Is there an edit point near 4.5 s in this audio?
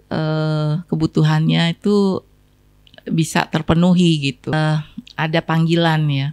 yes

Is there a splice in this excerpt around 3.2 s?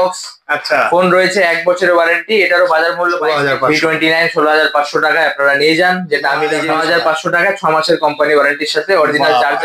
yes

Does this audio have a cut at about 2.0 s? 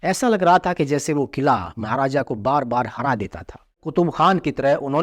no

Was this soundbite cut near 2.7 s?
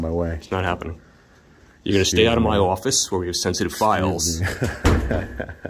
no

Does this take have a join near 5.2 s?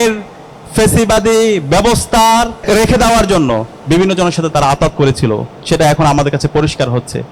no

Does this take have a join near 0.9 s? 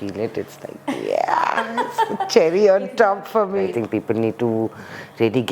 no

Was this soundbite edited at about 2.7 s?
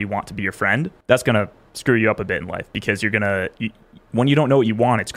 no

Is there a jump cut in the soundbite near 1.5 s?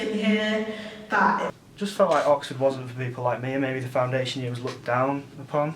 yes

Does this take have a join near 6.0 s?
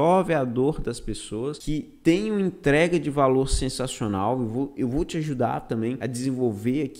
yes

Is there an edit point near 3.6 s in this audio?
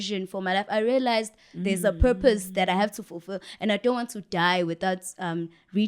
no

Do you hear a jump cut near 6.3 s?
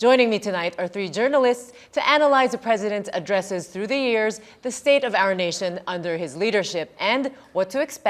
yes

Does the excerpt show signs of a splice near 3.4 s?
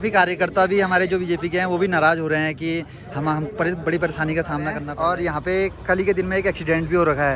no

